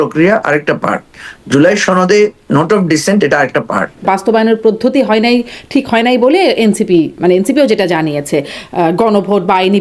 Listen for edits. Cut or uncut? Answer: cut